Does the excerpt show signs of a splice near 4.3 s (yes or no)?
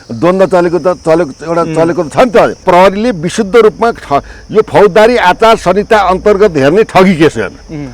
no